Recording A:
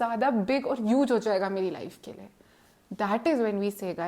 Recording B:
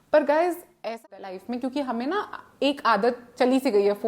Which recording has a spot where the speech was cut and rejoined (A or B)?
B